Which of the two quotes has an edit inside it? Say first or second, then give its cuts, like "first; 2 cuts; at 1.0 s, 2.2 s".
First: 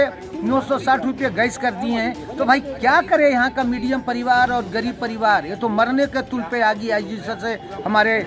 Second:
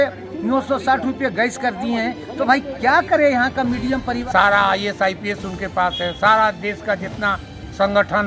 second; 1 cut; at 4.2 s